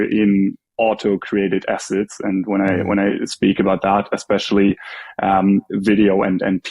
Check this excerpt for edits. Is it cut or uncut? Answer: uncut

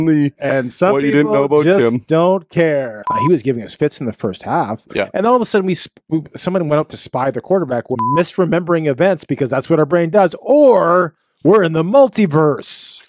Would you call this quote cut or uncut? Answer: cut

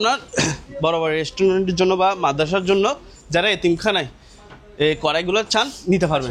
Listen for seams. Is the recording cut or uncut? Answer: uncut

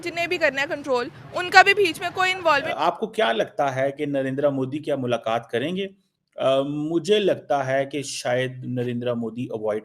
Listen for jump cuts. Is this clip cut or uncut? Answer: cut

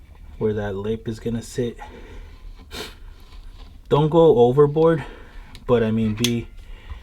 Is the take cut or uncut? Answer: uncut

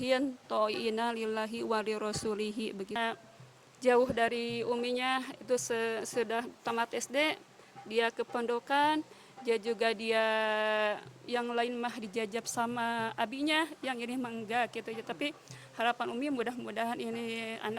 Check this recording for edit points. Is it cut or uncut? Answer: cut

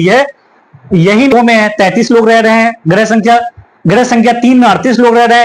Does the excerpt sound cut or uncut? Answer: cut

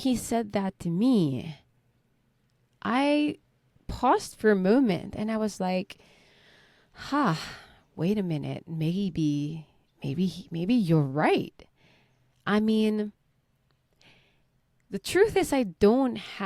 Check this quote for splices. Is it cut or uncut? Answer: uncut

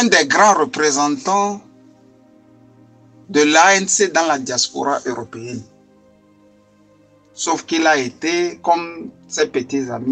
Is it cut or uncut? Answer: uncut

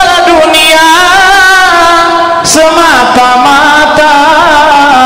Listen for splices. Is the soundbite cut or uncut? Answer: uncut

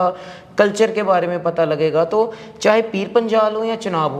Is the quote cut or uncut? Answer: uncut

